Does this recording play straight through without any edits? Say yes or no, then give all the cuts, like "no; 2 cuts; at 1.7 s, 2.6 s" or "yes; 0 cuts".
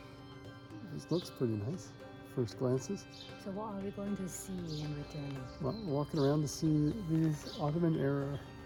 yes; 0 cuts